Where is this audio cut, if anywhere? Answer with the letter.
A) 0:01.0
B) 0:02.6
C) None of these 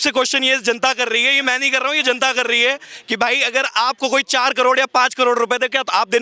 C